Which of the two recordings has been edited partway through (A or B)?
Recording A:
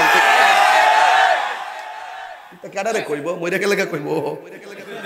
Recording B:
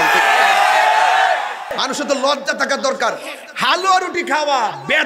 B